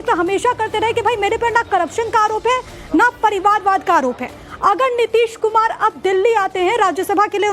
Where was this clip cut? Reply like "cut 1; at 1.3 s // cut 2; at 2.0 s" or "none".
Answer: cut 1; at 3.4 s